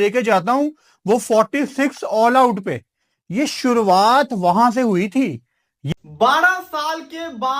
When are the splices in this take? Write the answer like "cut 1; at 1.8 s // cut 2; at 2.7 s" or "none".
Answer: cut 1; at 5.9 s